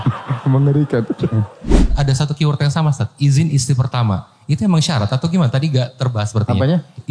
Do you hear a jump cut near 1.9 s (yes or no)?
yes